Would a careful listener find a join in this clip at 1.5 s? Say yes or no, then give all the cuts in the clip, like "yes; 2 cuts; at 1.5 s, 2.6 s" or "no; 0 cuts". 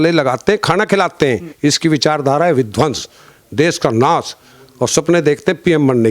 yes; 1 cut; at 1.5 s